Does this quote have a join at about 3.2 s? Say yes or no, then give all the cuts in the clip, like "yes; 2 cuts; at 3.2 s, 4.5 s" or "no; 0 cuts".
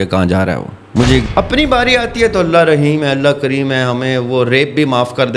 no; 1 cut; at 1.3 s